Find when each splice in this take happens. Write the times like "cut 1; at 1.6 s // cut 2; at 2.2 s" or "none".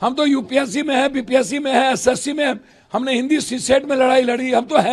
none